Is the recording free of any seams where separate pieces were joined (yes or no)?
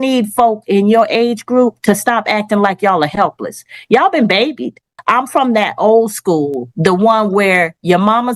no